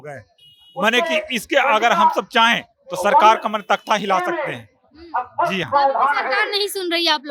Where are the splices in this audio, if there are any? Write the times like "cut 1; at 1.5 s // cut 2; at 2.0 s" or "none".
none